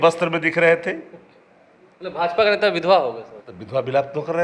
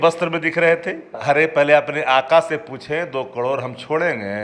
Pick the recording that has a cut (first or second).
second